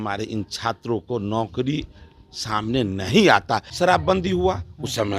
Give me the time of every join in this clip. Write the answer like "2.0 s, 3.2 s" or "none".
3.6 s